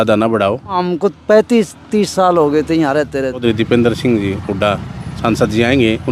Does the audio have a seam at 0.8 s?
yes; 2 cuts; at 0.8 s, 3.4 s

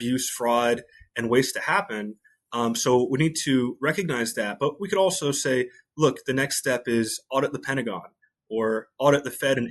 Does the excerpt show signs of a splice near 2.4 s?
no; 0 cuts

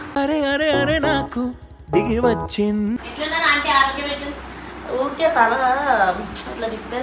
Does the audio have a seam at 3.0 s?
yes; 1 cut; at 3.0 s

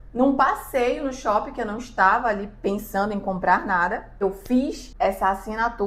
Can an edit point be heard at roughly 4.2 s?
yes; 2 cuts; at 4.2 s, 4.8 s

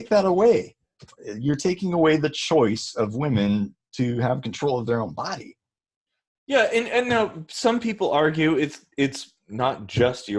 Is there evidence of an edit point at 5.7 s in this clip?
no; 0 cuts

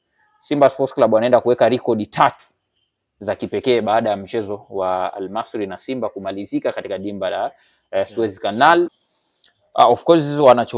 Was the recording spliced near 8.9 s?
yes; 1 cut; at 8.9 s

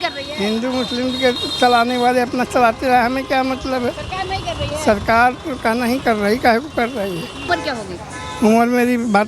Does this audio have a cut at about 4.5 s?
no; 1 cut; at 7.5 s

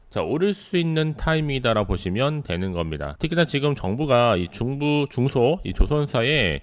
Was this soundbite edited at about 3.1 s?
yes; 1 cut; at 3.1 s

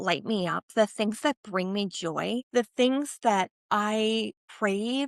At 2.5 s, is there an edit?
yes; 2 cuts; at 2.5 s, 3.9 s

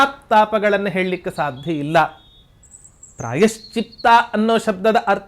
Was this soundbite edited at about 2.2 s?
no; 0 cuts

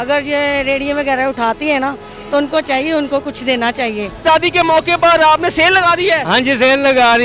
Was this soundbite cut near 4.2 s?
yes; 1 cut; at 4.2 s

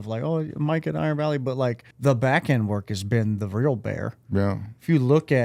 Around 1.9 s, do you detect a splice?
yes; 1 cut; at 1.9 s

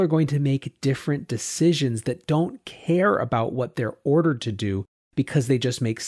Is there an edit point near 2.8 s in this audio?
no; 0 cuts

